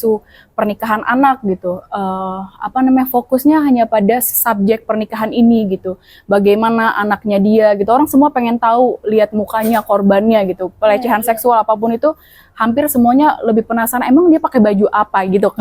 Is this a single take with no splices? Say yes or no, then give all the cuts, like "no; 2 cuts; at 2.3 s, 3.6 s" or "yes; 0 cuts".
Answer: yes; 0 cuts